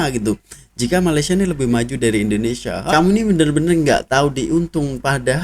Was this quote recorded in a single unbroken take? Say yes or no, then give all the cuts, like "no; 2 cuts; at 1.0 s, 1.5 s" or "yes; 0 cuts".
no; 1 cut; at 2.9 s